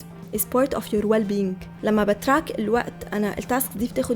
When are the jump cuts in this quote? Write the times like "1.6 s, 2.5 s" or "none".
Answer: 1.7 s